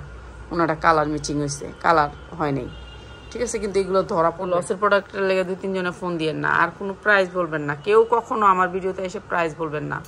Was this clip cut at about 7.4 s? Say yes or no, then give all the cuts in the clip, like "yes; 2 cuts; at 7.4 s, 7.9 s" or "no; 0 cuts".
no; 1 cut; at 4.5 s